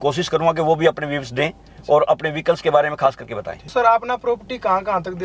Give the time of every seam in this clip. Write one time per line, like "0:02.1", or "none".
0:03.7